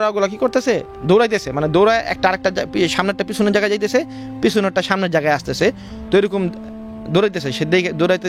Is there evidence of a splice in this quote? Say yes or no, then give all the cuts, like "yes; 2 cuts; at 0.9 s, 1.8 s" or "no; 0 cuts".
no; 0 cuts